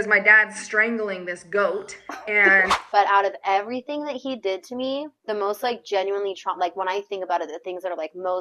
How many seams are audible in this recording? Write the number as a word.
one